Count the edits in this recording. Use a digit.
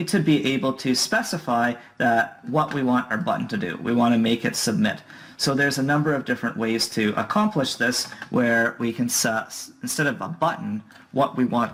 0